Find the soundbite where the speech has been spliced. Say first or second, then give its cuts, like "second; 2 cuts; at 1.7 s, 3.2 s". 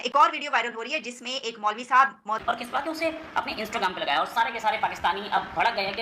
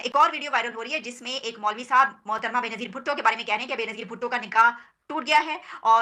first; 1 cut; at 2.4 s